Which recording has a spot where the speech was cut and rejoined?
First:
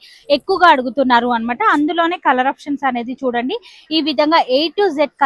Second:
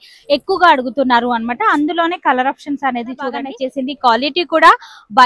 second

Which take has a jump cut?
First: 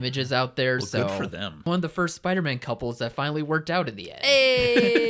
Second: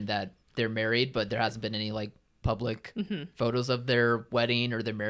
first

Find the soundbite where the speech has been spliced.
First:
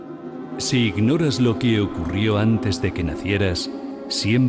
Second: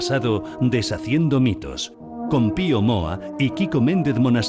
second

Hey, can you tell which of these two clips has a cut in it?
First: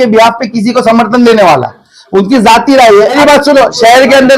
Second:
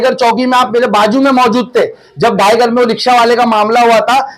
first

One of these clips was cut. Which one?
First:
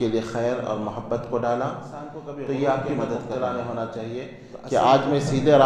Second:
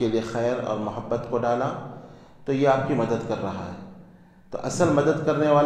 first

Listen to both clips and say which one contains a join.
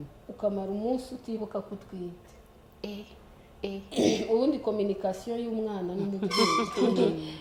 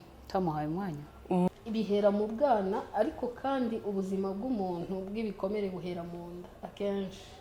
second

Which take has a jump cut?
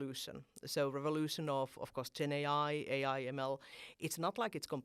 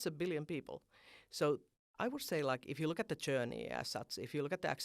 second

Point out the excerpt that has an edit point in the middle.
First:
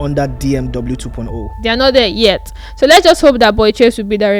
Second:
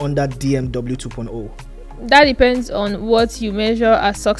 first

